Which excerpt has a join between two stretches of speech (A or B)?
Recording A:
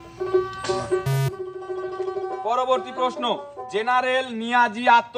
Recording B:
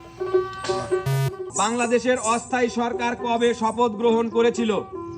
B